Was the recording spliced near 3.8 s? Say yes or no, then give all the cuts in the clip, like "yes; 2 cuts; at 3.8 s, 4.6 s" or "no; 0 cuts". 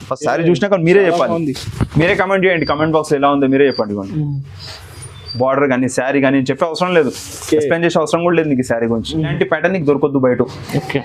no; 1 cut; at 9.3 s